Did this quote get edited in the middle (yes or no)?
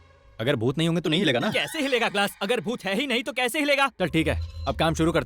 yes